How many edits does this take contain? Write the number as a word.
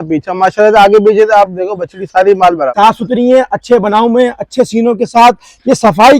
one